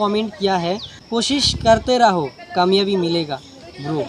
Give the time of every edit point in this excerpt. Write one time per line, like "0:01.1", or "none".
0:00.9